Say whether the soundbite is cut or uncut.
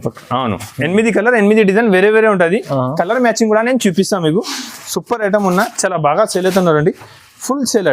uncut